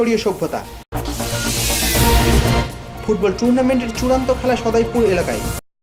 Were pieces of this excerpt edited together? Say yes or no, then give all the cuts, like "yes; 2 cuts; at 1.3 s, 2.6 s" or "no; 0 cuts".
no; 0 cuts